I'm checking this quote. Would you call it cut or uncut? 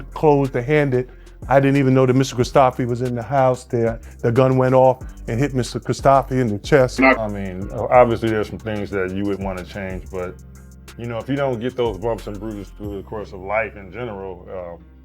cut